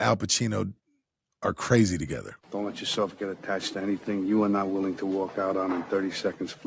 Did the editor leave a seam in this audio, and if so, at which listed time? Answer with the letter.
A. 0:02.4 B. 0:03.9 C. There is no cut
A